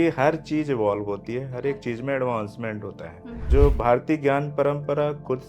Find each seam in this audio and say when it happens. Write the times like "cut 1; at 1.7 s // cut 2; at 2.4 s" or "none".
cut 1; at 3.3 s